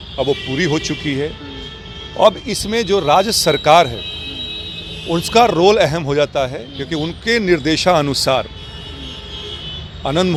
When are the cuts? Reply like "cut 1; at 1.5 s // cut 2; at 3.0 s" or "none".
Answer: none